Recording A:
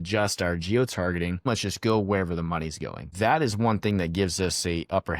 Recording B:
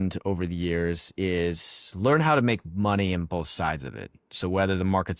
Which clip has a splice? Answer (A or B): A